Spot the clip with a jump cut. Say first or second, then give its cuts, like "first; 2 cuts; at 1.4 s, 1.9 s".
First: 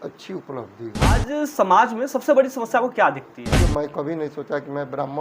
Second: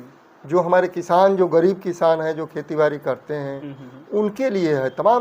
first; 2 cuts; at 1.2 s, 3.6 s